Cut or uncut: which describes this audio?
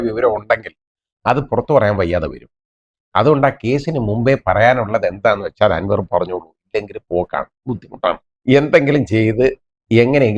cut